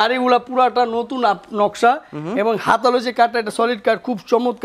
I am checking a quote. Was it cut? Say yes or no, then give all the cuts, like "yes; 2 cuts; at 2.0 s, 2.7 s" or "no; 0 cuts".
no; 0 cuts